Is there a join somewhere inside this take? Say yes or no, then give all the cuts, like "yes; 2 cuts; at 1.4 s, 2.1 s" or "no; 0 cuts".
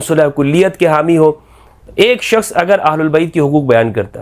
yes; 1 cut; at 1.8 s